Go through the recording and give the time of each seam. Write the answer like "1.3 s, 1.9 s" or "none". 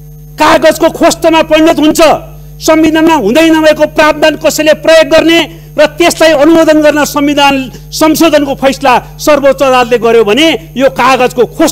none